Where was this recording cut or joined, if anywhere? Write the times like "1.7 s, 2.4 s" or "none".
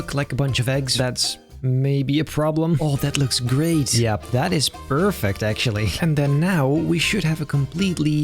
2.8 s, 6.0 s